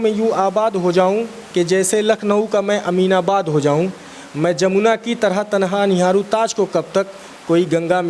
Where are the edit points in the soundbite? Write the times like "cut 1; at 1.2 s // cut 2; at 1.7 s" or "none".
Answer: none